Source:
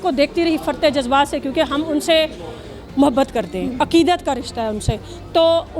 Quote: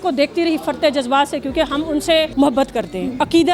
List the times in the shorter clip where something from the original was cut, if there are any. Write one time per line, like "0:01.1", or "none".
0:02.3